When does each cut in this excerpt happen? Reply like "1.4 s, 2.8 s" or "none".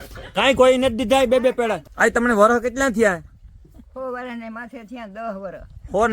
1.9 s

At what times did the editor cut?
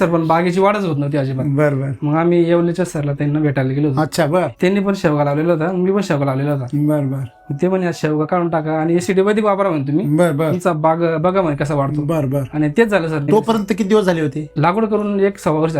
4.5 s, 13.2 s, 14.5 s

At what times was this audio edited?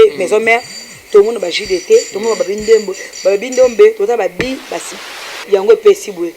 4.8 s

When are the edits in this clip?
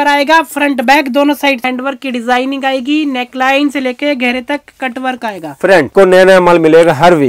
1.6 s, 5.9 s

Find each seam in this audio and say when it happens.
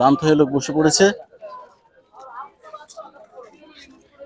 none

